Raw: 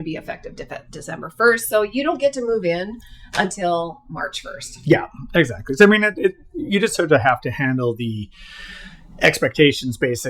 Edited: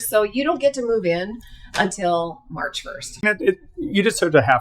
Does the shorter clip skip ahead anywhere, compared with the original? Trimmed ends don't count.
yes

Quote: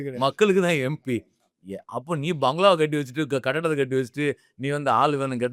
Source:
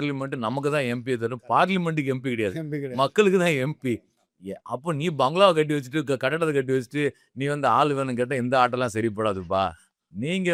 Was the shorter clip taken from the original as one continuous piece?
yes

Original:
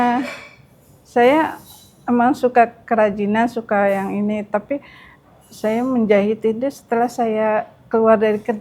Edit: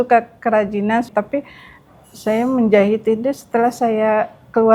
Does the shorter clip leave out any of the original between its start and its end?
yes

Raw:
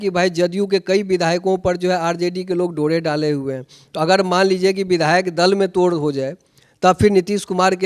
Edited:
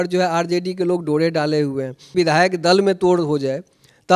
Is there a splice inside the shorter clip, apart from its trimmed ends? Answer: yes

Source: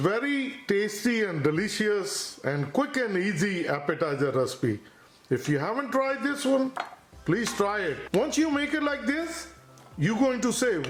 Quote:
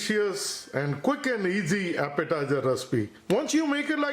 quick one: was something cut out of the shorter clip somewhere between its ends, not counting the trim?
yes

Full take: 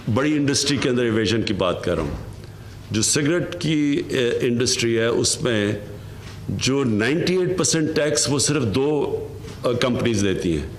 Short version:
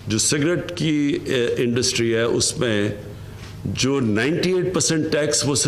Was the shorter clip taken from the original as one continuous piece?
yes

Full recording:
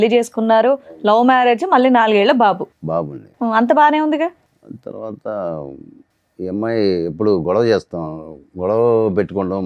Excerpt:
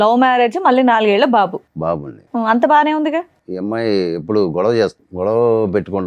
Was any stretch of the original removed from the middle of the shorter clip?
yes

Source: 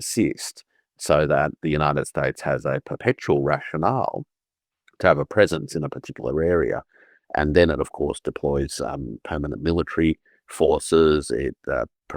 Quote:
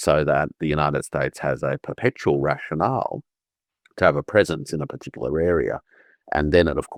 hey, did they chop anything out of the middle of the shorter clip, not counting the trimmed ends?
no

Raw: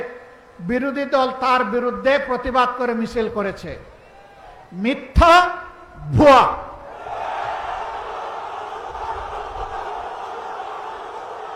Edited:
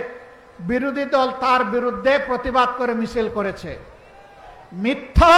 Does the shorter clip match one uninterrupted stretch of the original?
yes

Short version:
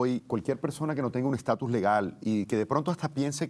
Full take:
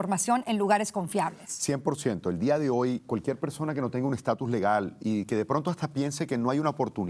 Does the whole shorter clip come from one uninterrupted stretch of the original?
yes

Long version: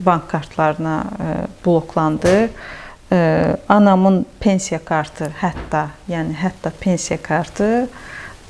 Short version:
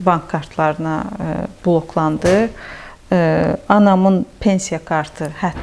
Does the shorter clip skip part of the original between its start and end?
no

